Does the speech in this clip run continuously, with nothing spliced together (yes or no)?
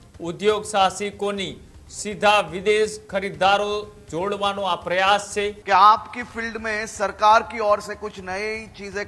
no